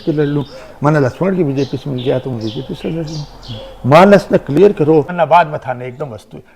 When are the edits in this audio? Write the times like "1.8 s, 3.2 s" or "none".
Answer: 5.1 s

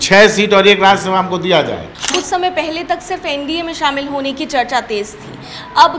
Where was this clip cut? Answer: 2.0 s

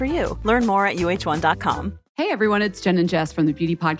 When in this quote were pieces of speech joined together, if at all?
2.0 s

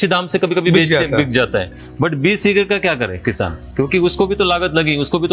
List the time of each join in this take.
none

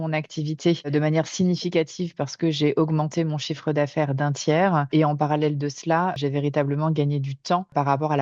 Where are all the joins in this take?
6.2 s

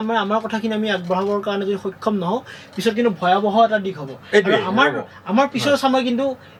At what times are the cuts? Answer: none

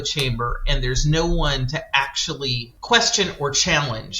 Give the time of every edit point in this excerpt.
2.7 s

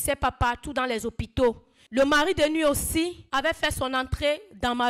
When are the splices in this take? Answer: 1.7 s, 3.2 s

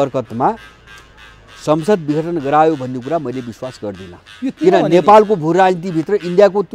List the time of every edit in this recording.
none

